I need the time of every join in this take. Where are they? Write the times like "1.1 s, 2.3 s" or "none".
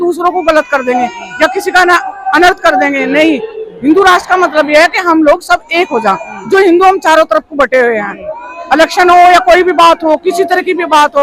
none